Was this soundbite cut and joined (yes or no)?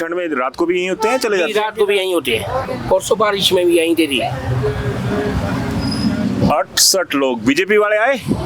no